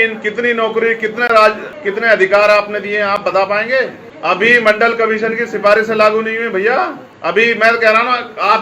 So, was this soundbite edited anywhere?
yes; 3 cuts; at 1.7 s, 4.0 s, 7.1 s

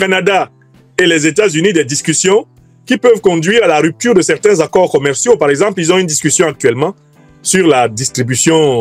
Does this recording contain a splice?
no; 0 cuts

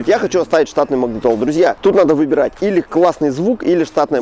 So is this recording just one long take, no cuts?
no; 1 cut; at 1.8 s

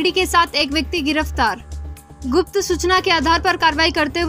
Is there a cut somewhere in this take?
no; 0 cuts

